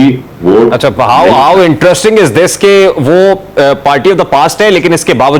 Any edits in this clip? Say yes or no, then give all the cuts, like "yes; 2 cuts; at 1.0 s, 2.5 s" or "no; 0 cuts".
no; 0 cuts